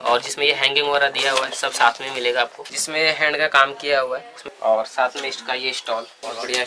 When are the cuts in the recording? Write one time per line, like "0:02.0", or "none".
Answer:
none